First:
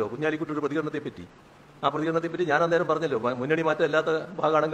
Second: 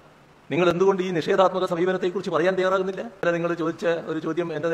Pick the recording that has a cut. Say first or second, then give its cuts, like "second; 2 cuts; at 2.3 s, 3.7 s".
second; 1 cut; at 3.2 s